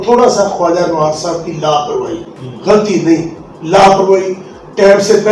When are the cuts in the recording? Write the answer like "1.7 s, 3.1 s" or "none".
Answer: none